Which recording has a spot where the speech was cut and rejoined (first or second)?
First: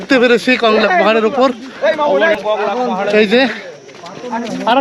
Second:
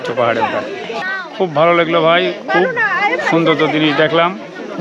second